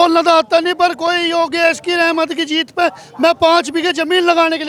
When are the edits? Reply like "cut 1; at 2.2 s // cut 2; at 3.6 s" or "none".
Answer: none